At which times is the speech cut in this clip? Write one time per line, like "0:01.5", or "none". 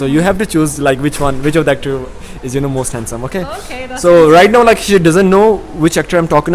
none